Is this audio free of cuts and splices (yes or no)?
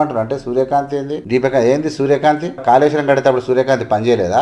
no